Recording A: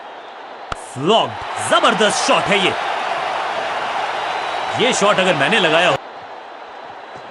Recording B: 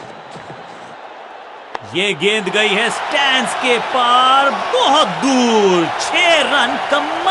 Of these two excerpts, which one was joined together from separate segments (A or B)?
A